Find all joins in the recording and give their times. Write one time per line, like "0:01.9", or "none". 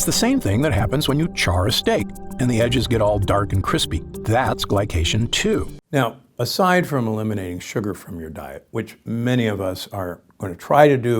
0:05.7